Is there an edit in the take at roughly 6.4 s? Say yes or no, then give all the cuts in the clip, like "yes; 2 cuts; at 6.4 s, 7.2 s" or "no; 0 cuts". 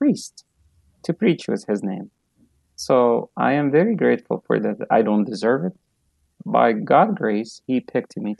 yes; 1 cut; at 6.4 s